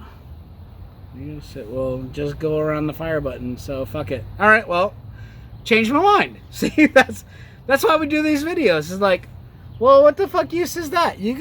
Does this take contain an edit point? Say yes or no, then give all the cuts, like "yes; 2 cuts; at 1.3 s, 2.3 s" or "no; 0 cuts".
yes; 1 cut; at 4.7 s